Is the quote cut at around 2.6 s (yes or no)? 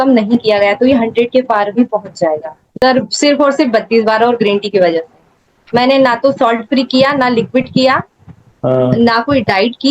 yes